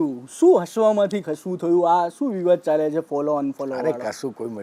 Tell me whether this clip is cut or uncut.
uncut